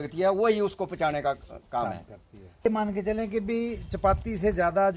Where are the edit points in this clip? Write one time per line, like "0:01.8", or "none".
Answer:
0:02.7